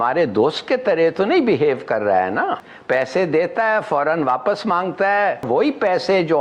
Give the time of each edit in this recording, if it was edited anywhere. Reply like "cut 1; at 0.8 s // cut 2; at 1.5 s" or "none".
cut 1; at 2.7 s // cut 2; at 5.5 s